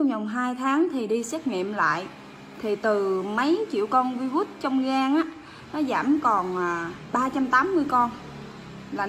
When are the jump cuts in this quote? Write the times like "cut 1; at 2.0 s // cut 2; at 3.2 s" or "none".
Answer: none